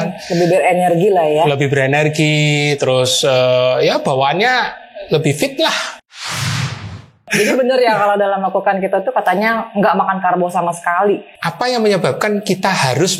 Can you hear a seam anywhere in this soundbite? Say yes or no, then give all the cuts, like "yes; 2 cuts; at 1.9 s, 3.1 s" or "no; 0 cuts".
yes; 2 cuts; at 7.3 s, 11.4 s